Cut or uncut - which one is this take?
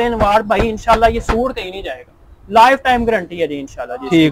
uncut